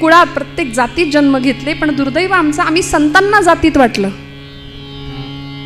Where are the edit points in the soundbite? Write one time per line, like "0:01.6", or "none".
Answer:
none